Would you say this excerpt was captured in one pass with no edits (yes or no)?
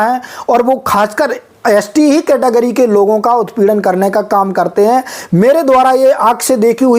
yes